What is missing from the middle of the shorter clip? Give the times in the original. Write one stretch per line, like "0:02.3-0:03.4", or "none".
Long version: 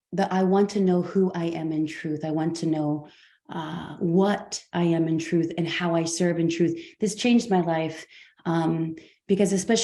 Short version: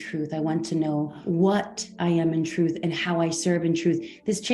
0:03.1-0:03.9